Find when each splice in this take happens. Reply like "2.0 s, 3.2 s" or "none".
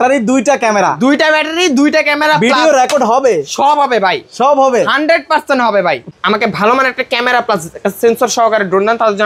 6.1 s